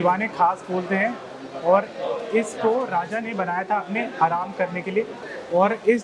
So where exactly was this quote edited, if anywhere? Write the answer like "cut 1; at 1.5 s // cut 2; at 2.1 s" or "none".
none

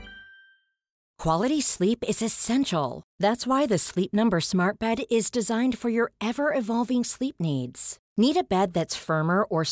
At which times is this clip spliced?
cut 1; at 1.0 s

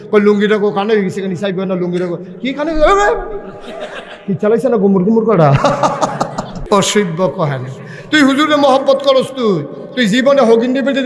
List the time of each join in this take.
cut 1; at 6.5 s

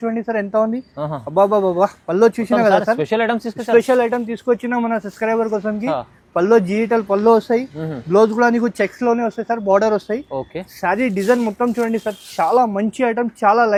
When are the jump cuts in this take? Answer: none

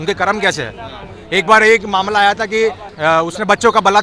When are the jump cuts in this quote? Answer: cut 1; at 2.9 s

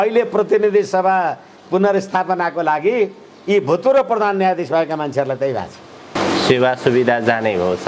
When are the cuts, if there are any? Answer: none

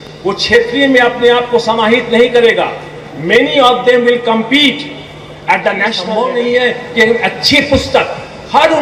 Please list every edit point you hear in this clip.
cut 1; at 6.0 s

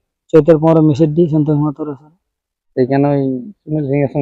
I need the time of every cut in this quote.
none

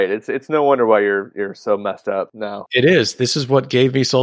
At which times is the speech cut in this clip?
cut 1; at 2.6 s

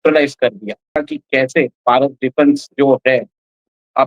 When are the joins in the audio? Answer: cut 1; at 1.0 s

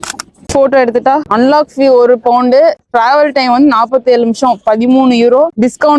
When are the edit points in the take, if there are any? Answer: cut 1; at 1.3 s // cut 2; at 2.8 s

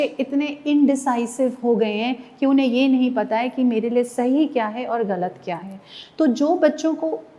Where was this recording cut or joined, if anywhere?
none

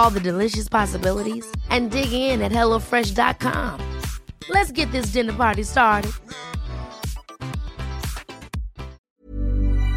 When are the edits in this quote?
cut 1; at 9.0 s

